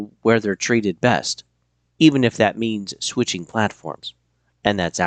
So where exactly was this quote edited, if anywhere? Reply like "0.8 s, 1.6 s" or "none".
none